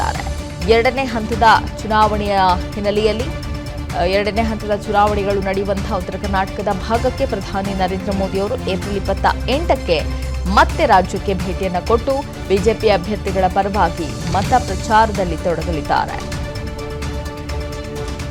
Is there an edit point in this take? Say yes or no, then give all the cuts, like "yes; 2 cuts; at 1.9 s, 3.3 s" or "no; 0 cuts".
no; 0 cuts